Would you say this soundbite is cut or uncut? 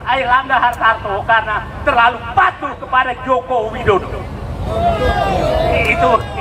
uncut